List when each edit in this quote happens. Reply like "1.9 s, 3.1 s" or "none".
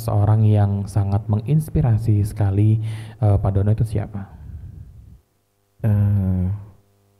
none